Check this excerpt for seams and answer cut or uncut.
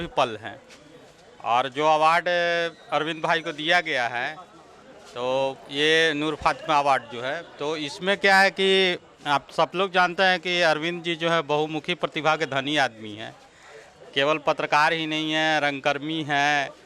uncut